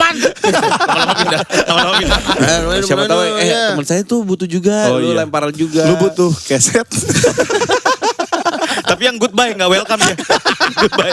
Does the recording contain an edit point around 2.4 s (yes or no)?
yes